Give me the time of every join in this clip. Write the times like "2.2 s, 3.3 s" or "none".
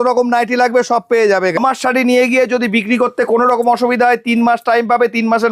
1.6 s